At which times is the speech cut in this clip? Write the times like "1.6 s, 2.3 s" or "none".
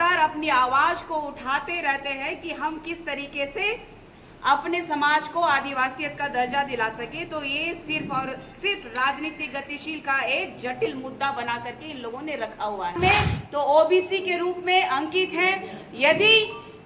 13.0 s